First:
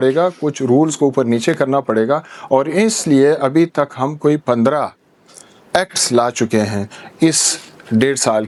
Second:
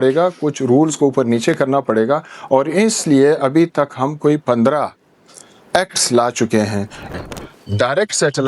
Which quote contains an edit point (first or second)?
second